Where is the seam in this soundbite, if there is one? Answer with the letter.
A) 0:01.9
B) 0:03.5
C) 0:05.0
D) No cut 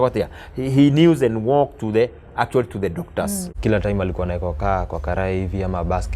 B